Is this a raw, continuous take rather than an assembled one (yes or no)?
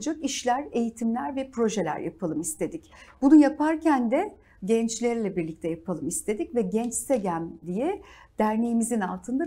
yes